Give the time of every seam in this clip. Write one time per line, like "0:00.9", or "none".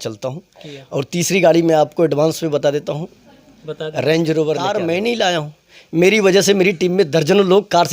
0:04.7

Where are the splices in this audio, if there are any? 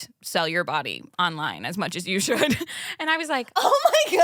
none

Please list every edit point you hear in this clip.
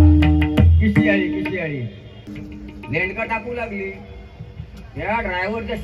0:02.2

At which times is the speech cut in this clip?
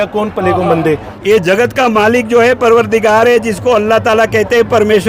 0:01.1

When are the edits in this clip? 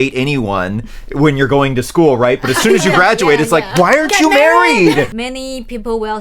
0:05.2

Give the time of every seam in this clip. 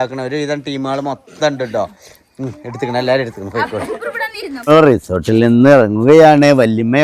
0:04.7

